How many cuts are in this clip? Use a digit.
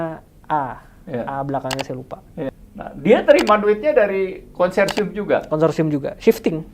1